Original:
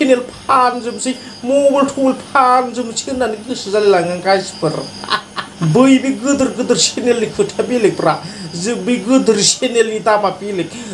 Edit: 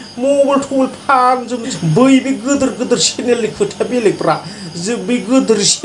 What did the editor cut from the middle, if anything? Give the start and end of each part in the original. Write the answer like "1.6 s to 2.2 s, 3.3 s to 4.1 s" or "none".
2.9 s to 5.4 s